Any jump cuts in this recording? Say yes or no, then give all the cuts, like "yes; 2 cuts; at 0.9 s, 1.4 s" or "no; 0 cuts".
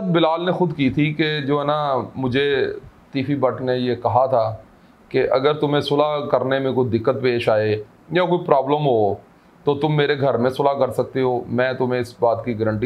no; 0 cuts